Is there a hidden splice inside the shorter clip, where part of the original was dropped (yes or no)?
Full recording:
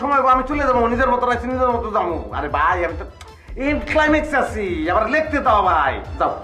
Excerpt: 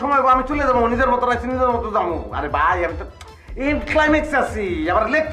no